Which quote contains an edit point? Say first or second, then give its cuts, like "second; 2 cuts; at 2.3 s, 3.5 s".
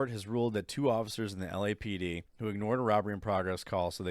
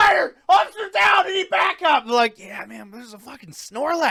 first; 1 cut; at 2.3 s